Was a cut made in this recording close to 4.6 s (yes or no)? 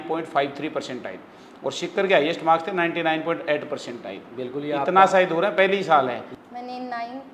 no